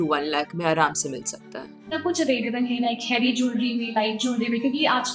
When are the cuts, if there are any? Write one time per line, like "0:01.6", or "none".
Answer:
none